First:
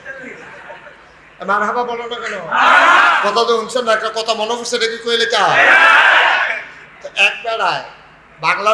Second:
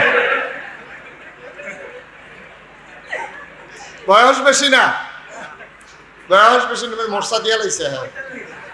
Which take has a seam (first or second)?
first